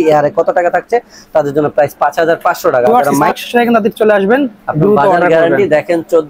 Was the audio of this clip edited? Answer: yes; 1 cut; at 3.1 s

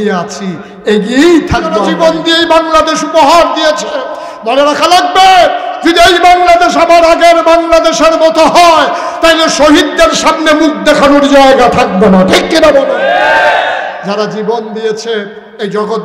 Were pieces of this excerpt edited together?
yes; 1 cut; at 1.9 s

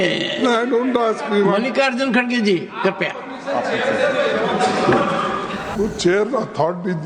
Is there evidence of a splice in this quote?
yes; 1 cut; at 5.7 s

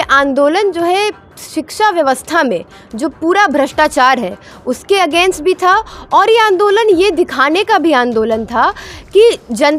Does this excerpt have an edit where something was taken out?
no; 0 cuts

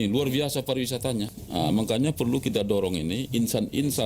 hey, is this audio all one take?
no; 1 cut; at 1.3 s

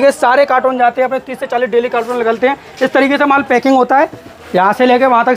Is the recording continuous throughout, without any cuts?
no; 1 cut; at 4.3 s

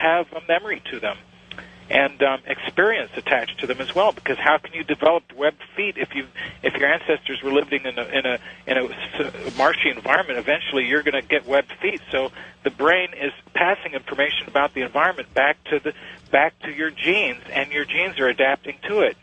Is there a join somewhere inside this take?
yes; 1 cut; at 13.7 s

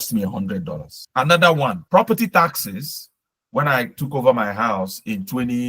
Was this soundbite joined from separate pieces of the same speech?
yes; 2 cuts; at 1.0 s, 1.8 s

